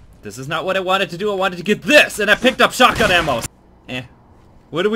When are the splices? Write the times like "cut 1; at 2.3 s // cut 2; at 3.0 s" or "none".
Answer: cut 1; at 3.4 s